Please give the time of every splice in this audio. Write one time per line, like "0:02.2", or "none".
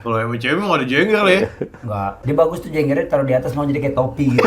0:02.2